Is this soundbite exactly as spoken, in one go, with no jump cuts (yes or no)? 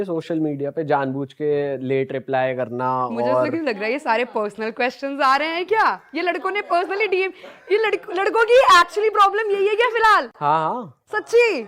yes